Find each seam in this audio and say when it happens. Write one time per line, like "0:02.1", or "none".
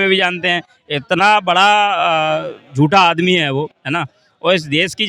none